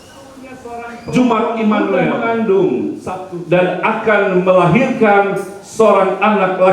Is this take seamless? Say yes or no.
no